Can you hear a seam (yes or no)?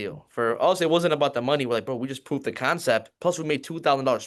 no